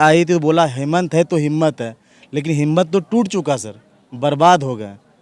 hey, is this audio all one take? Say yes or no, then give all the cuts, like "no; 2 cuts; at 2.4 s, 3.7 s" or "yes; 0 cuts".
yes; 0 cuts